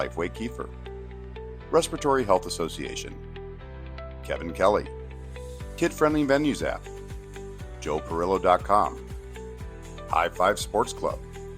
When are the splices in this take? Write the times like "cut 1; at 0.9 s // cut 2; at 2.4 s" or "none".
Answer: cut 1; at 2.8 s // cut 2; at 4.2 s

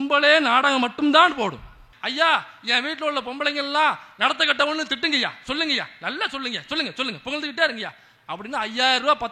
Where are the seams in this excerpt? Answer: cut 1; at 1.9 s

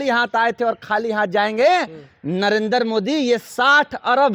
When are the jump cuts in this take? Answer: none

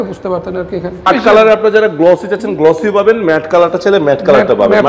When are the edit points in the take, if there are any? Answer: cut 1; at 1.1 s

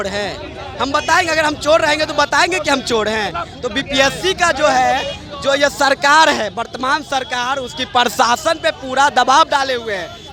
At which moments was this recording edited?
none

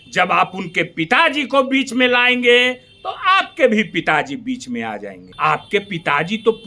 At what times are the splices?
cut 1; at 5.2 s

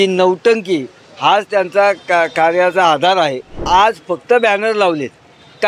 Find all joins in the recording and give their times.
cut 1; at 3.6 s

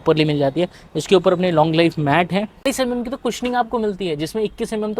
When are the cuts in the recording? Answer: cut 1; at 2.7 s

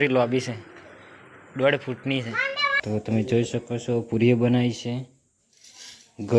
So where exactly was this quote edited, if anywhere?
cut 1; at 2.8 s

